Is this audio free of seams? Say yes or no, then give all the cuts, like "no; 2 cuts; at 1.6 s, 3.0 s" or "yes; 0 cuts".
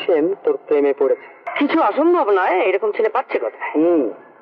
no; 1 cut; at 1.4 s